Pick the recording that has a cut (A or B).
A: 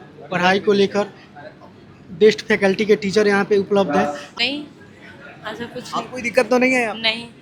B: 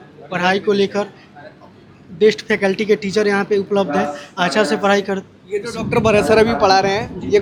A